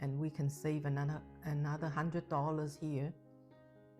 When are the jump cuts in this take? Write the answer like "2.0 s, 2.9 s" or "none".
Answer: none

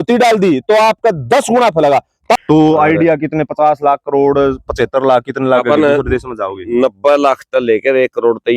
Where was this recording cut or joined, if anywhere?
2.4 s

